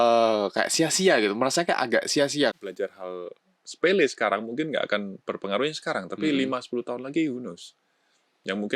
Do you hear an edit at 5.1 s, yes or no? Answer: no